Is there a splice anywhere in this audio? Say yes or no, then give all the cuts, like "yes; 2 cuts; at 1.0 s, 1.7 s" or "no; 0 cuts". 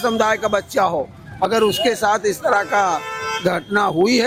no; 0 cuts